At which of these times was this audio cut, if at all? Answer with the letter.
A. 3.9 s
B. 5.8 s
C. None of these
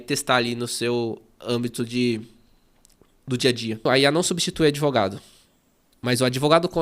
A